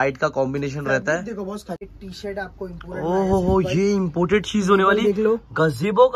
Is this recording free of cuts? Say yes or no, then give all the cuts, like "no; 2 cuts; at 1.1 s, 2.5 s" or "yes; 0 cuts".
no; 1 cut; at 1.9 s